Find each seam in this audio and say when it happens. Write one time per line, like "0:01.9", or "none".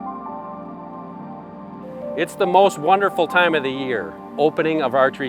0:02.2
0:04.2

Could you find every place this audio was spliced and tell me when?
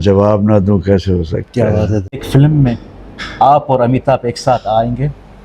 0:02.2

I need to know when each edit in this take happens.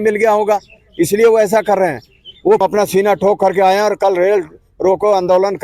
0:02.6

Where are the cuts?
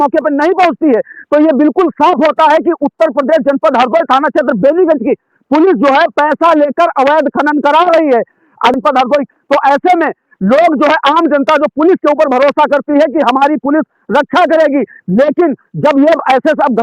0:08.7

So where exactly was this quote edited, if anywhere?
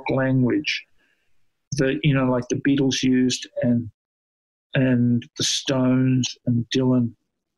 none

